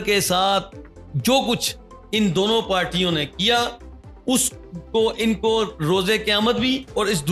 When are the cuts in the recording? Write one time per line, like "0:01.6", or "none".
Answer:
none